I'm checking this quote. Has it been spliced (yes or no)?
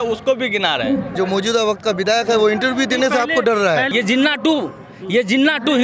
yes